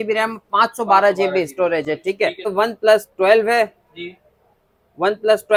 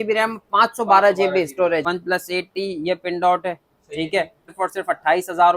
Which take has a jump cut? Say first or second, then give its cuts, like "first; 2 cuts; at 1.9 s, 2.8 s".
second; 2 cuts; at 1.8 s, 4.5 s